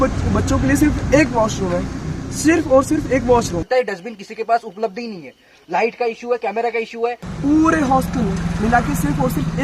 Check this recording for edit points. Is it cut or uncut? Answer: cut